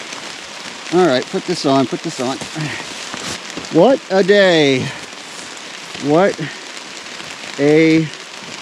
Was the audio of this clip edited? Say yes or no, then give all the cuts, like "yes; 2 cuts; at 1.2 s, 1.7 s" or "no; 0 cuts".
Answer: yes; 1 cut; at 3.3 s